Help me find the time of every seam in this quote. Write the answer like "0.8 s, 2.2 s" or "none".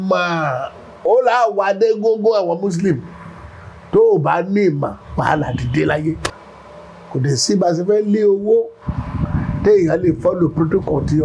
6.3 s